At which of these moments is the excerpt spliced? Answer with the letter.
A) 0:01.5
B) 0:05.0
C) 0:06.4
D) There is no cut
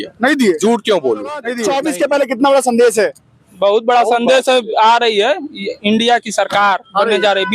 A